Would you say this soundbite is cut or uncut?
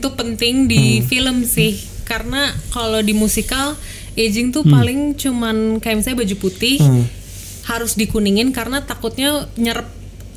uncut